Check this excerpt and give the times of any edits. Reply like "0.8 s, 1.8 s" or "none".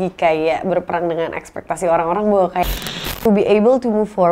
3.2 s